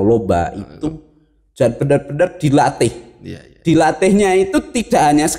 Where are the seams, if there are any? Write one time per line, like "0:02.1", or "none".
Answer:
none